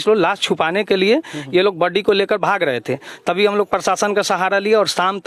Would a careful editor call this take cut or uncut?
uncut